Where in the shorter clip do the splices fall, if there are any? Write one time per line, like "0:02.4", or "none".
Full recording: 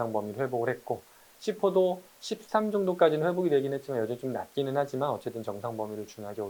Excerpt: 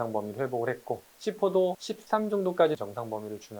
0:01.1
0:01.9
0:02.8